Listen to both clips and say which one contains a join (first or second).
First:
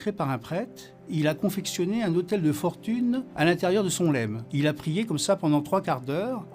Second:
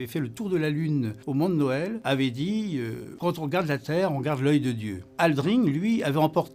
second